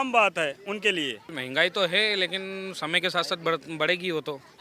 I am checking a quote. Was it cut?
yes; 1 cut; at 1.3 s

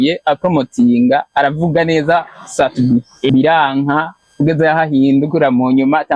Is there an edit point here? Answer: yes; 2 cuts; at 3.3 s, 4.2 s

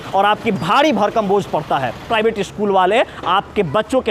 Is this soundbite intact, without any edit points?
no; 1 cut; at 2.1 s

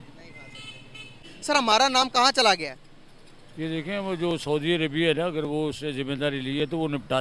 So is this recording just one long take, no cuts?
no; 1 cut; at 1.2 s

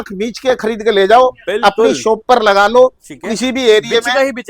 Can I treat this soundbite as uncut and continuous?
yes; 0 cuts

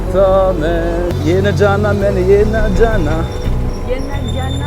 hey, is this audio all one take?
no; 1 cut; at 1.1 s

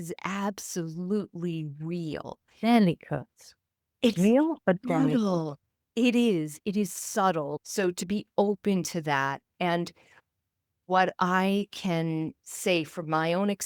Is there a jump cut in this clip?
yes; 1 cut; at 7.5 s

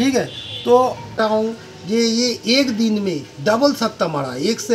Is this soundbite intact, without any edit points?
no; 1 cut; at 1.2 s

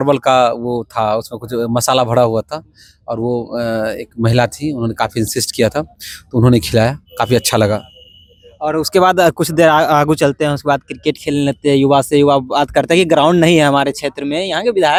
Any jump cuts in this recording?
no; 0 cuts

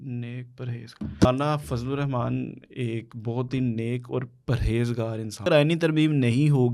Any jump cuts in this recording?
yes; 2 cuts; at 1.2 s, 5.4 s

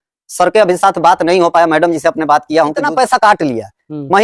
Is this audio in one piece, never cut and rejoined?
no; 1 cut; at 2.8 s

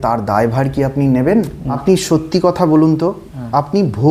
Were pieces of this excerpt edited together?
yes; 1 cut; at 1.6 s

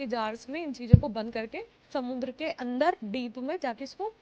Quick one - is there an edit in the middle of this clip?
yes; 1 cut; at 3.0 s

